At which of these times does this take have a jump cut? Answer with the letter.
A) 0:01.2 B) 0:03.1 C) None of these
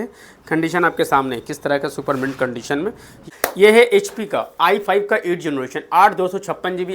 B